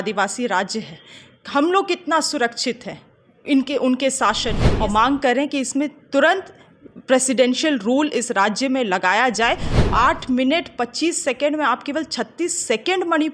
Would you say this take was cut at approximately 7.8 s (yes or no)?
no